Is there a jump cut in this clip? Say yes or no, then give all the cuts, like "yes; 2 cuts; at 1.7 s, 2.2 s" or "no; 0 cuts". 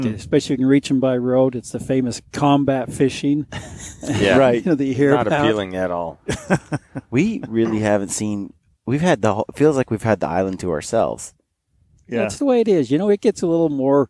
no; 0 cuts